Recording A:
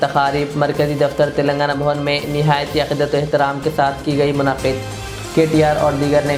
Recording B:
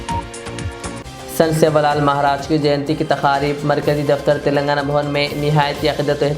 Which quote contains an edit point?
B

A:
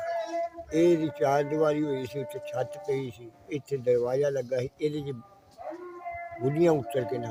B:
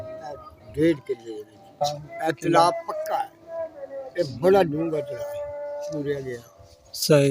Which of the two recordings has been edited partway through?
B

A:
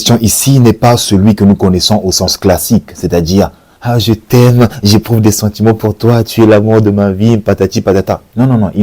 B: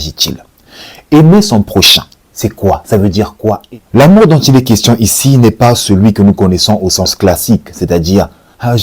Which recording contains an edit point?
B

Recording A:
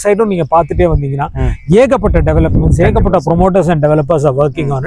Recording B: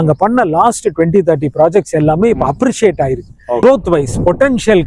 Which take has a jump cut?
B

